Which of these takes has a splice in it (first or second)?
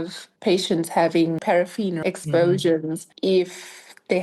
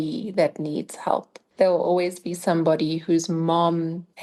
first